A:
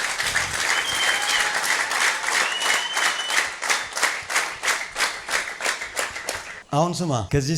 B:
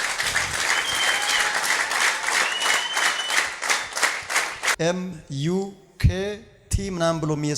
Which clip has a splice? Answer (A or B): B